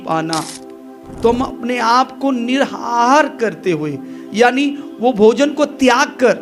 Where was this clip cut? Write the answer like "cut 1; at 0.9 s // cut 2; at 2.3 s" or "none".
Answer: cut 1; at 1.1 s